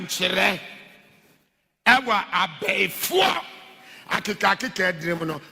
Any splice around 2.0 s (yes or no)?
no